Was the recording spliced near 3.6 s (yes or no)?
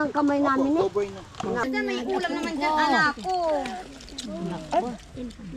no